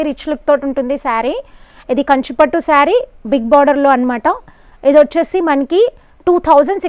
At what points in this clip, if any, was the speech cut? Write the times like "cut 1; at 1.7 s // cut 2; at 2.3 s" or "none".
none